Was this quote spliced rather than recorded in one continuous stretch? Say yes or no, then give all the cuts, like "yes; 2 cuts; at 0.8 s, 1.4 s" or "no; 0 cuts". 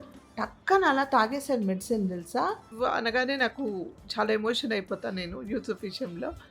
yes; 1 cut; at 2.7 s